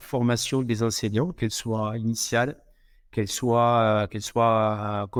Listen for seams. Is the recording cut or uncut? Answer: uncut